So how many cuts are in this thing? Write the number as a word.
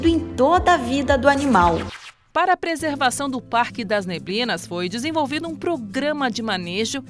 one